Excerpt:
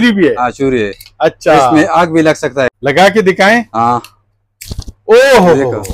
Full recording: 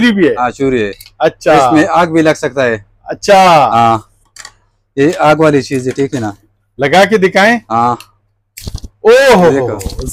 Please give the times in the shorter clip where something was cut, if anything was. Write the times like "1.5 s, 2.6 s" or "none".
2.7 s